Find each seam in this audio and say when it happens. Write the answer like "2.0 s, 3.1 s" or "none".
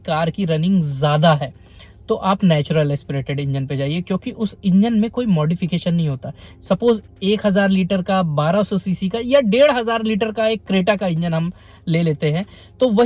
none